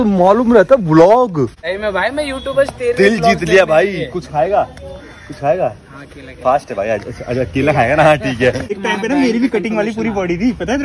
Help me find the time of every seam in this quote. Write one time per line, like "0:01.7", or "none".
0:01.6
0:08.7